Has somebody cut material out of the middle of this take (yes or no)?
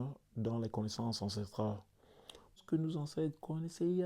yes